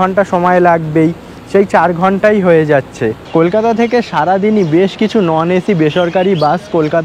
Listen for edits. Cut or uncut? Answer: cut